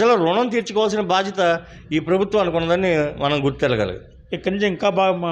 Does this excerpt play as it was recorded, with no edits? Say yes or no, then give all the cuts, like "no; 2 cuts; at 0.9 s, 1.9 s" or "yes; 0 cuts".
no; 1 cut; at 3.9 s